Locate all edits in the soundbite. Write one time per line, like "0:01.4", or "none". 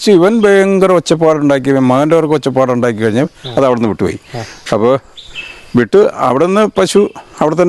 none